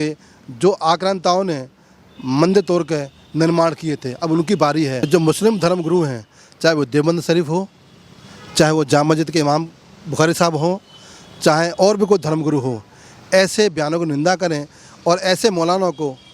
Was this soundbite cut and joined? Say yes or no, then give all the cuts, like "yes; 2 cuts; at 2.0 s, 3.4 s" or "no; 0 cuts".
yes; 1 cut; at 5.0 s